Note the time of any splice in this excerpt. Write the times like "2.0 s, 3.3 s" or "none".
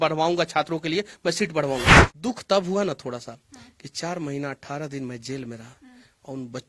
2.0 s